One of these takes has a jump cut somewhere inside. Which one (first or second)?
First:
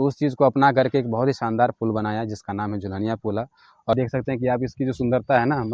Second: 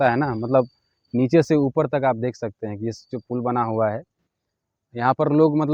first